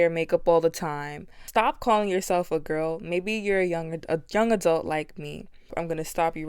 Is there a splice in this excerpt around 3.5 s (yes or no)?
no